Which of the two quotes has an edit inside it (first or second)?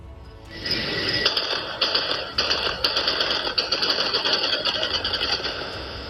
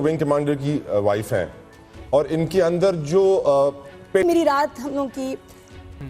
second